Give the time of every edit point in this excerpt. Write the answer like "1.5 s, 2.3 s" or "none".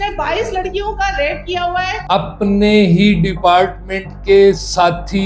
2.0 s